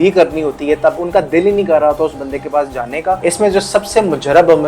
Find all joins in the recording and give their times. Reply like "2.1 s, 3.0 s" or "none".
1.0 s, 3.2 s